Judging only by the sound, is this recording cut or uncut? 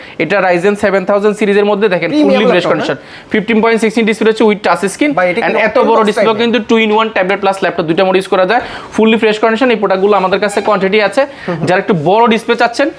uncut